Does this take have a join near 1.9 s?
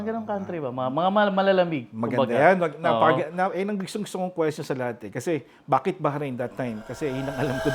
no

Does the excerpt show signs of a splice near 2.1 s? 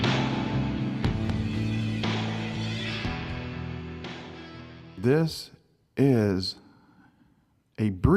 no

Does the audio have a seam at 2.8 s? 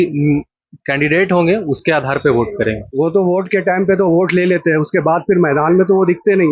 yes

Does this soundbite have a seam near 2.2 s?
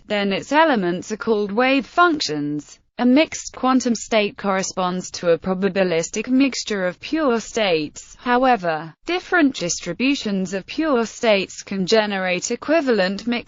yes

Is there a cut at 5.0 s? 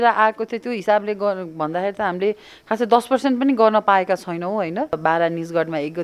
yes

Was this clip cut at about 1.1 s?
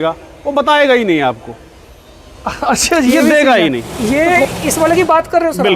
no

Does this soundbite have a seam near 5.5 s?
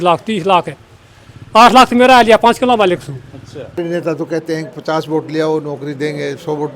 no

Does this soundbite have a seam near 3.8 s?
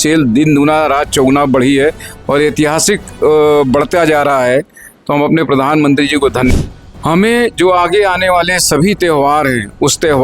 no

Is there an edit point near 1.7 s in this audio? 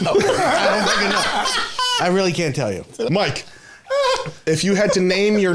no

